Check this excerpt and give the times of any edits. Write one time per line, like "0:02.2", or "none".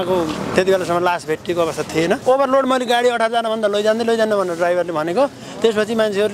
0:02.2